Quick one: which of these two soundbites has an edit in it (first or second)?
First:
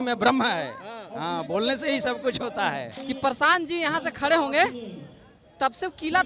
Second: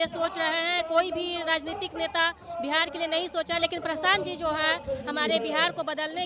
first